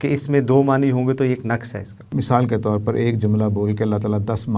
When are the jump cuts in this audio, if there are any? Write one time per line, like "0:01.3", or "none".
0:02.1